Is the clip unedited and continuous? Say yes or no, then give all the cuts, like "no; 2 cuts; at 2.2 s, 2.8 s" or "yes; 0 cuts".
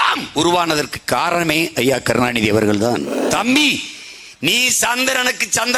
no; 1 cut; at 3.2 s